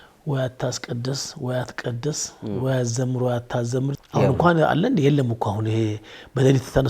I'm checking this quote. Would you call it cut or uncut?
cut